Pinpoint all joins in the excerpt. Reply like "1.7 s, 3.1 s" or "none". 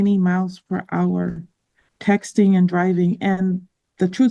none